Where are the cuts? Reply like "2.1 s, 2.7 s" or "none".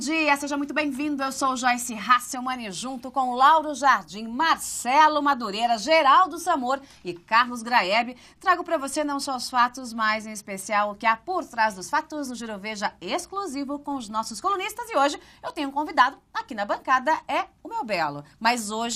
none